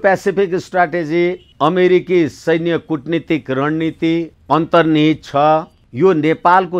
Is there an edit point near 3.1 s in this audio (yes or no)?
no